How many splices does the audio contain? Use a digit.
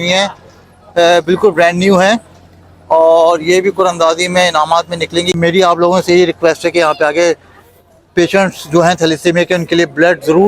1